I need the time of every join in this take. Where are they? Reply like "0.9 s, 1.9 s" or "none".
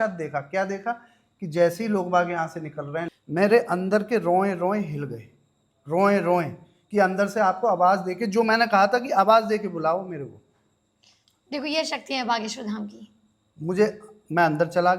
3.1 s

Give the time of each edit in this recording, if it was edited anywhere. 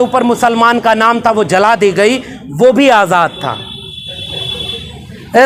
none

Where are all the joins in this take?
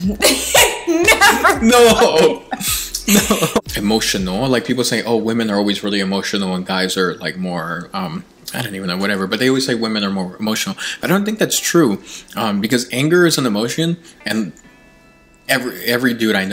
3.6 s

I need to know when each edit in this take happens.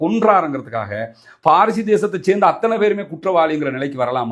none

